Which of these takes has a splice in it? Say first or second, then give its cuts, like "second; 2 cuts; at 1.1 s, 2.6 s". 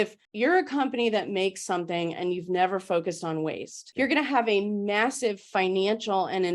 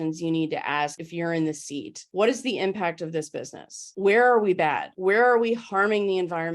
second; 4 cuts; at 1.0 s, 2.0 s, 3.9 s, 4.9 s